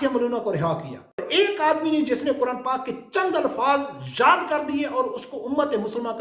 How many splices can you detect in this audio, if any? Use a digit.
1